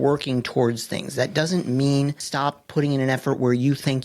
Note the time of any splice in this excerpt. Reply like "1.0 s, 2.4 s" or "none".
2.2 s